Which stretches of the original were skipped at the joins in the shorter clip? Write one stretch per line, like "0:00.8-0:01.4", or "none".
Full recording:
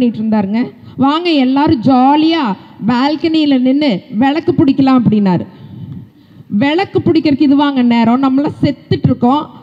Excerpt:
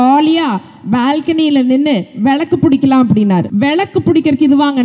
0:05.4-0:06.5